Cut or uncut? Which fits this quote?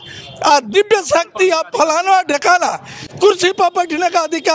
uncut